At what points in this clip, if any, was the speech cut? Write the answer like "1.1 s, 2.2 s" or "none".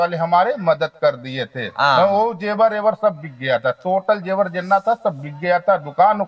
none